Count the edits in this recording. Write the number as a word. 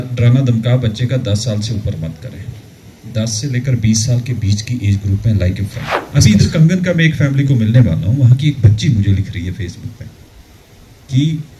one